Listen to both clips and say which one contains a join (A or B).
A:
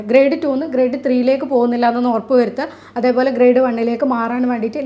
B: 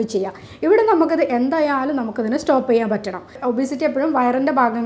B